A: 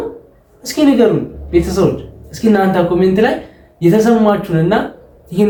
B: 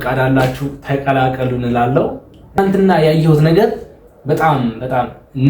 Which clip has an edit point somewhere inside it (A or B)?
B